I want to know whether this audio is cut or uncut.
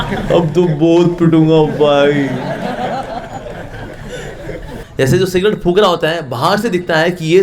cut